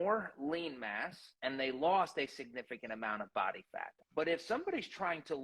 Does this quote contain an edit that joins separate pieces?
yes; 1 cut; at 4.0 s

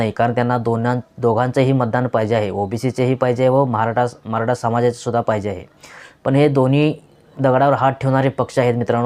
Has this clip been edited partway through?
no; 0 cuts

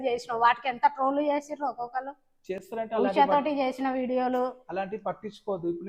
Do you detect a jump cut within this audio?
no; 0 cuts

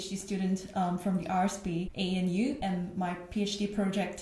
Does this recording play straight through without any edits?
no; 2 cuts; at 1.9 s, 2.6 s

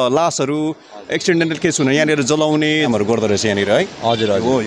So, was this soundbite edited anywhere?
yes; 1 cut; at 2.9 s

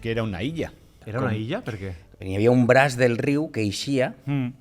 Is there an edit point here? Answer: yes; 1 cut; at 1.0 s

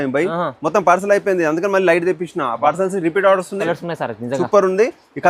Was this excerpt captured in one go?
no; 1 cut; at 3.6 s

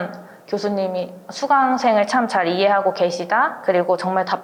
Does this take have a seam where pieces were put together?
no; 0 cuts

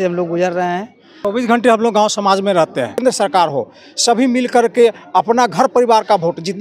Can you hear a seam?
yes; 2 cuts; at 1.1 s, 3.0 s

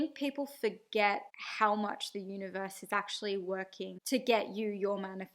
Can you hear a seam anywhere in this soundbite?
yes; 1 cut; at 4.0 s

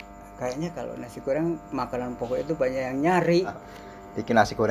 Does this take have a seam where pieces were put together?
yes; 1 cut; at 3.5 s

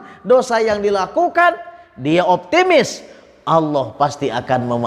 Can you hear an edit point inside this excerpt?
no; 0 cuts

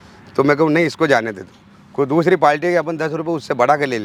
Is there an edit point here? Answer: no; 0 cuts

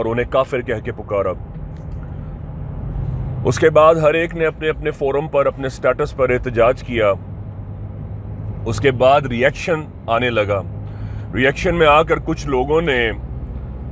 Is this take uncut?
yes; 0 cuts

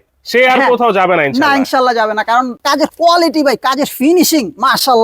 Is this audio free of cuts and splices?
no; 1 cut; at 2.6 s

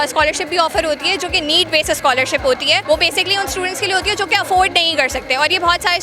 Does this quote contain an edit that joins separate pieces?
yes; 1 cut; at 2.8 s

